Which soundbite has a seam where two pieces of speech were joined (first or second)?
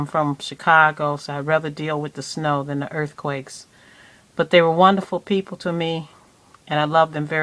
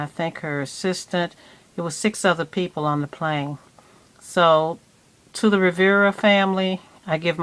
first